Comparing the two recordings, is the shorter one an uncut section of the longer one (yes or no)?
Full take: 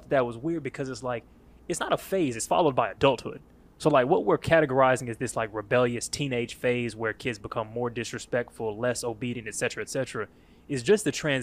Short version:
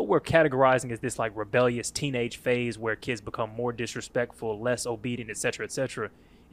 yes